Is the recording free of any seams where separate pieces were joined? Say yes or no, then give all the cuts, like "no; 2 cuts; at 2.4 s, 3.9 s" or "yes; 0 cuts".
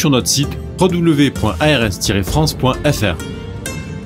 no; 1 cut; at 3.2 s